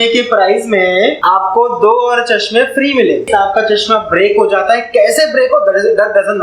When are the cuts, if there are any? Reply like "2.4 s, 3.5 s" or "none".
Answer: 1.2 s, 3.3 s